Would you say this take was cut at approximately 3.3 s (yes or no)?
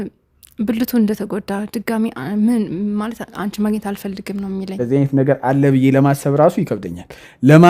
no